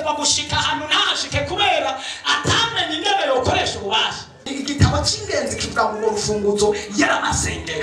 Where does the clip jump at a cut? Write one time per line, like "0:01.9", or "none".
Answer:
0:04.5